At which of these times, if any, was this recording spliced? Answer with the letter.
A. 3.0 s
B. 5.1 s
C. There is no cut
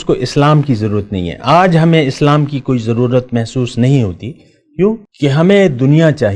B